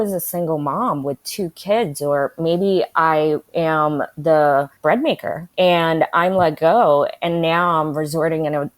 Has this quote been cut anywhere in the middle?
yes; 2 cuts; at 3.5 s, 5.1 s

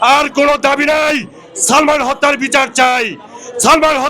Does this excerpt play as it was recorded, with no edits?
yes; 0 cuts

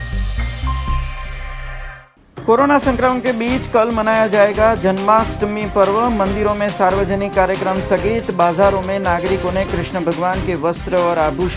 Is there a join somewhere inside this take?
yes; 1 cut; at 1.7 s

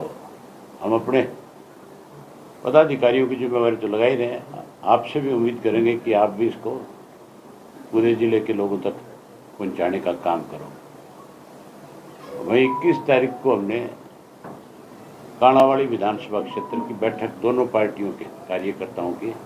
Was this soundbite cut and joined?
no; 0 cuts

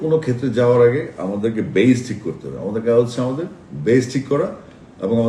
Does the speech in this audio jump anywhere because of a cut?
no; 0 cuts

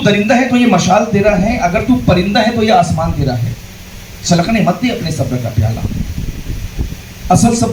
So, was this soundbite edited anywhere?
no; 0 cuts

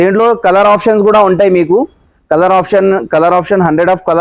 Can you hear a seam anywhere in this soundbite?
no; 0 cuts

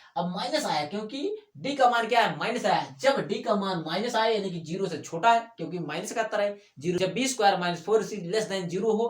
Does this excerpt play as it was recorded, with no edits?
no; 1 cut; at 7.0 s

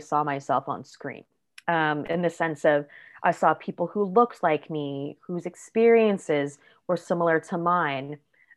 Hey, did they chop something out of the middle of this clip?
no; 0 cuts

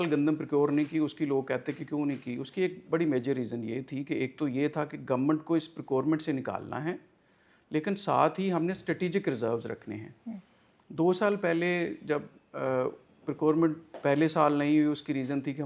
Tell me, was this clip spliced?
no; 0 cuts

